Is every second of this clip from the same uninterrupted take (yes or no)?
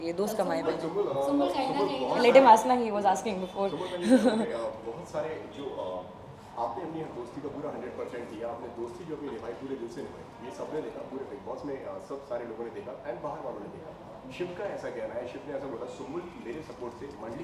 yes